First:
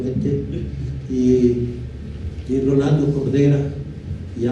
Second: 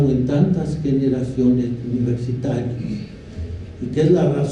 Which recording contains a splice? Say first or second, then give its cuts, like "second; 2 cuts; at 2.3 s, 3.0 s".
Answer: second; 1 cut; at 1.9 s